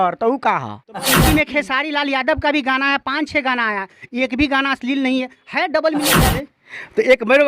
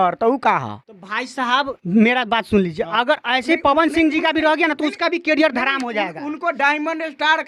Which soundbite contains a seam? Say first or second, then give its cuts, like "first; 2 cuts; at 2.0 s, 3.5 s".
first; 2 cuts; at 1.2 s, 6.1 s